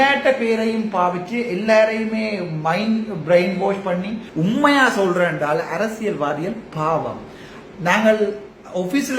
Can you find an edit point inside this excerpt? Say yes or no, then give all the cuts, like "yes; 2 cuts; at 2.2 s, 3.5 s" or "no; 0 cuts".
yes; 1 cut; at 4.2 s